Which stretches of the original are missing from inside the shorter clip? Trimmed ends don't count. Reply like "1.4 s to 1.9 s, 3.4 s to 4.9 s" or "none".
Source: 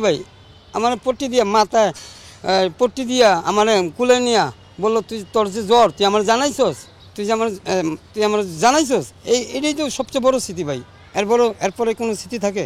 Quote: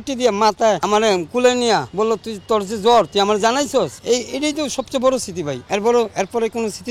1.9 s to 3.5 s, 4.5 s to 4.7 s, 6.8 s to 9.2 s, 10.8 s to 11.0 s